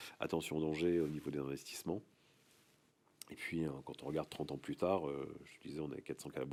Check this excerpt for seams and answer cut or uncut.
uncut